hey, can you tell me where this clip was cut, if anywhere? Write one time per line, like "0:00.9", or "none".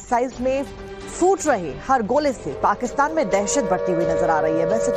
none